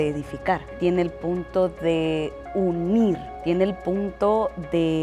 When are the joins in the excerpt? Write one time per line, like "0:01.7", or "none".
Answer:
0:00.8
0:03.3